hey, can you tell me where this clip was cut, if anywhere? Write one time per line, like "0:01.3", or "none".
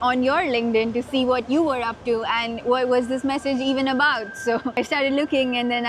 none